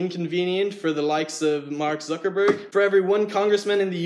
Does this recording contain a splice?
yes; 1 cut; at 2.6 s

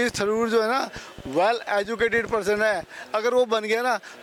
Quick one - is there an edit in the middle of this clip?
no; 0 cuts

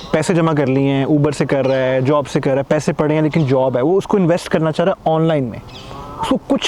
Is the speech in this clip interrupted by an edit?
no; 0 cuts

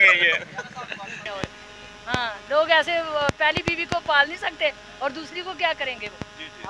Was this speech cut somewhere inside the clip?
yes; 1 cut; at 1.2 s

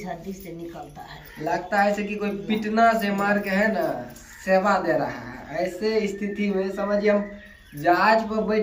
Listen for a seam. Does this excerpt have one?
no; 0 cuts

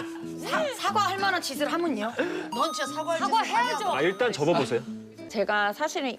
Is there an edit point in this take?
yes; 1 cut; at 5.2 s

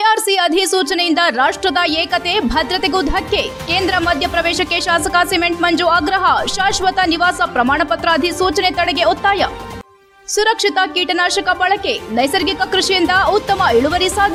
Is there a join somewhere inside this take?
no; 0 cuts

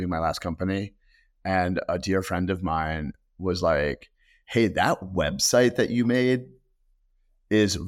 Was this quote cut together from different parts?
no; 0 cuts

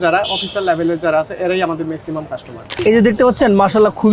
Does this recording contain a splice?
yes; 1 cut; at 2.7 s

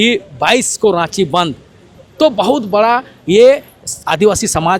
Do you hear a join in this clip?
no; 0 cuts

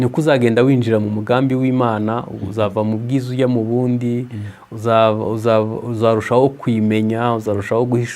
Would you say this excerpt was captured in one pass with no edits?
yes; 0 cuts

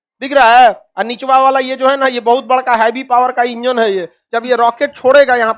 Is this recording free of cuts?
no; 1 cut; at 4.2 s

